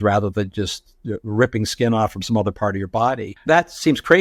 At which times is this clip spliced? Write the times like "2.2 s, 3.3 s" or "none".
3.3 s

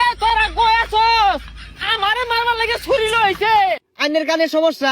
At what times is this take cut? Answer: 3.9 s

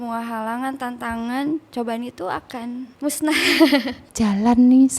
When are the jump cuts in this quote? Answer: 2.9 s, 4.0 s

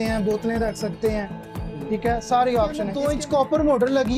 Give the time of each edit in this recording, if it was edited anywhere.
2.9 s

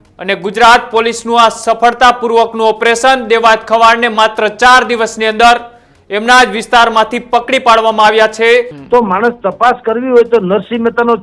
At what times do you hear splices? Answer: 8.8 s

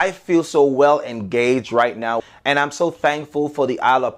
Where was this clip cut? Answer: 2.2 s

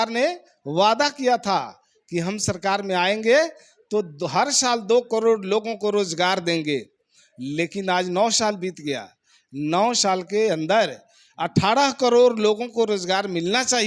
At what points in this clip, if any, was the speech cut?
none

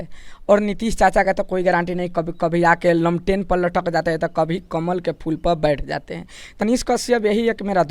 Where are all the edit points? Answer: 6.6 s

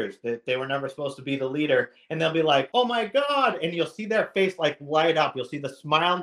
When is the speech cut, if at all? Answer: 2.7 s

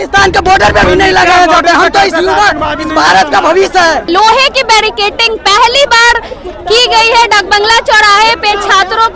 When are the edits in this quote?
4.1 s

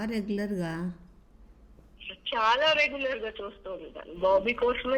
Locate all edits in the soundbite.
none

